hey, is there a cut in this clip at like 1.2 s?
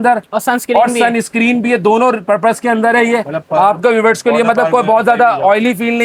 no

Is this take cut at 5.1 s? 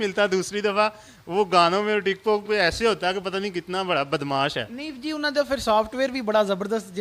no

